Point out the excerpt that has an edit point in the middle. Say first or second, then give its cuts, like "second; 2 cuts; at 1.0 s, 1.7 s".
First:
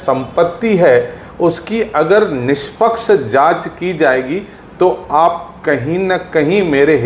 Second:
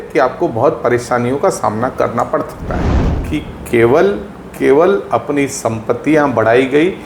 second; 1 cut; at 2.9 s